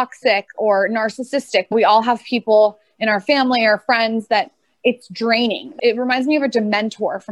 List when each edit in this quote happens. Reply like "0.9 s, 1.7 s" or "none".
5.7 s